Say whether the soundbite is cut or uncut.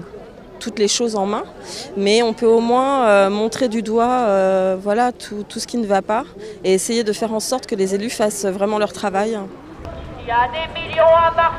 cut